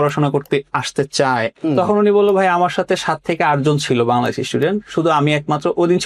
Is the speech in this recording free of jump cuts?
no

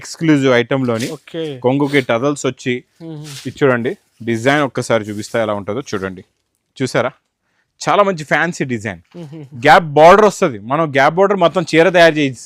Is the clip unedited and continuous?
yes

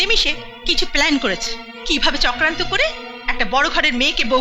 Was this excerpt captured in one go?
yes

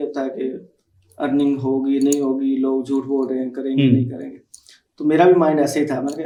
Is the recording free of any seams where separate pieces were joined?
yes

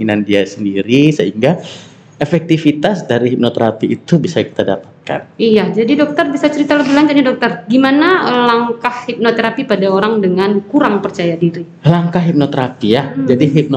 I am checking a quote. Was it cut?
no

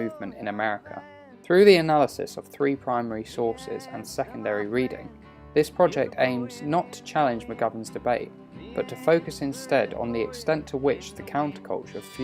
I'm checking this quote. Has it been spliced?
yes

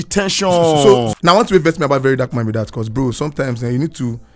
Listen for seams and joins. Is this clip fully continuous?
no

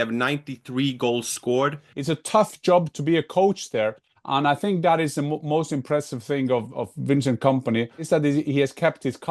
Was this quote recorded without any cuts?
no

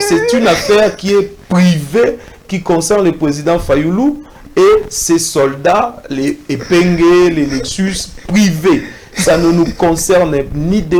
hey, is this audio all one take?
yes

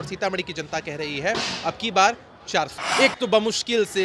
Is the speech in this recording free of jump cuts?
no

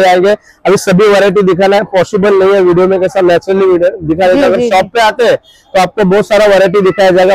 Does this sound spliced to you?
no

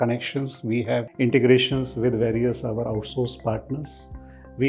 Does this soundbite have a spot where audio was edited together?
no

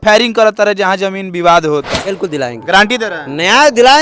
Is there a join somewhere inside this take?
yes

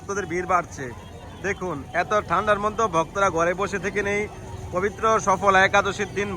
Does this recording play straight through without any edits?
yes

